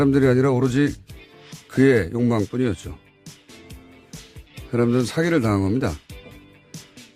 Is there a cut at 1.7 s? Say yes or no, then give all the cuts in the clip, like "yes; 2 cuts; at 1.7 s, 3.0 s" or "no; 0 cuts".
no; 1 cut; at 4.0 s